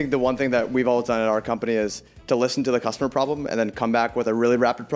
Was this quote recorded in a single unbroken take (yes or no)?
yes